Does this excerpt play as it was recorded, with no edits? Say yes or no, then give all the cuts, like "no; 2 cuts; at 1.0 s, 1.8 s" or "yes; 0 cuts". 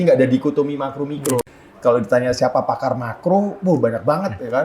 no; 1 cut; at 1.4 s